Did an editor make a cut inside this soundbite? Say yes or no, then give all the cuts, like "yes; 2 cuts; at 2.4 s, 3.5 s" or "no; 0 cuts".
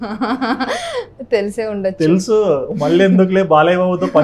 no; 0 cuts